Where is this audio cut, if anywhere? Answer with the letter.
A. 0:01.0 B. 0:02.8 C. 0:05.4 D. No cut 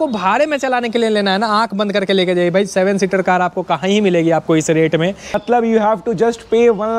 C